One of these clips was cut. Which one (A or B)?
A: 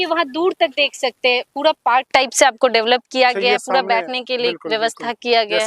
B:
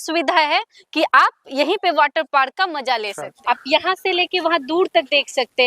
B